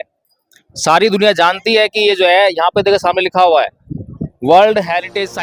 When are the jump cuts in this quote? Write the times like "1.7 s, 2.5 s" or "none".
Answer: none